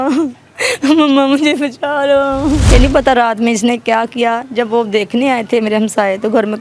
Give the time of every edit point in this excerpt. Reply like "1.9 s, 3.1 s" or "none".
2.6 s